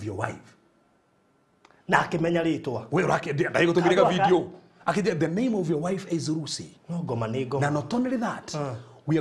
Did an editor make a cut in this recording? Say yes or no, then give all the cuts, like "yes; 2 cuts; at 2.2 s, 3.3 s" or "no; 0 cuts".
no; 0 cuts